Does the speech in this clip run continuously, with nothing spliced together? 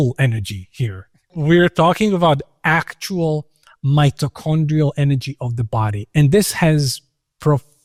yes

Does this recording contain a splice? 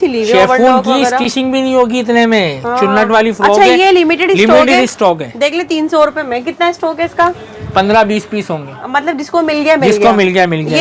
no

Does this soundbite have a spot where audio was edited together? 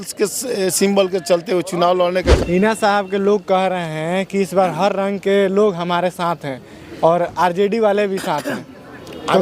yes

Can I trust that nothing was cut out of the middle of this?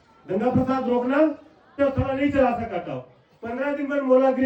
no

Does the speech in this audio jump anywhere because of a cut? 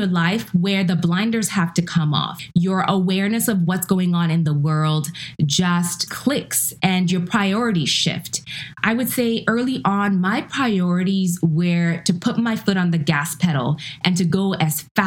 yes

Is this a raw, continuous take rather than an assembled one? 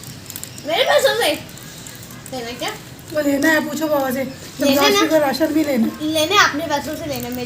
yes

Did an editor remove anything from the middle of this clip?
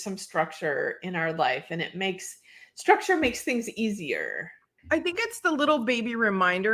no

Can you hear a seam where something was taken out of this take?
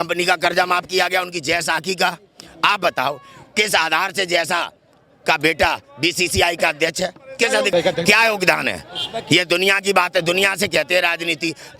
yes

